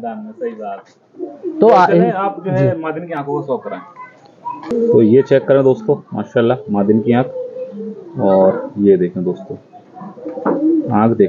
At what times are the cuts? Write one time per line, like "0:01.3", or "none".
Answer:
none